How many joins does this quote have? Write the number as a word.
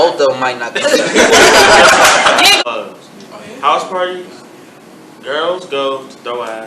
one